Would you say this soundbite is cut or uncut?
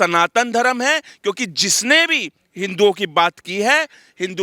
uncut